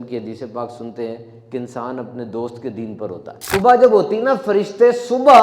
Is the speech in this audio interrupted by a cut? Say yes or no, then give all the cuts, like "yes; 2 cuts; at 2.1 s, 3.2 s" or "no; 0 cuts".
yes; 1 cut; at 3.3 s